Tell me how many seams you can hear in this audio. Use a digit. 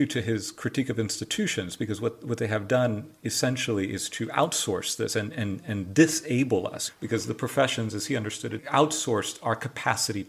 2